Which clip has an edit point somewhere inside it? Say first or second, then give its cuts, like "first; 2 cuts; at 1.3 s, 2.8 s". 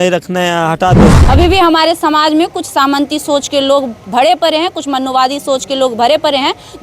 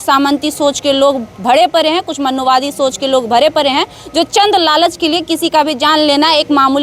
first; 1 cut; at 1.2 s